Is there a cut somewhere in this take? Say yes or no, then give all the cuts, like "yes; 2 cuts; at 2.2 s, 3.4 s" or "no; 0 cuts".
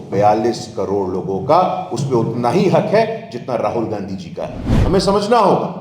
yes; 1 cut; at 4.7 s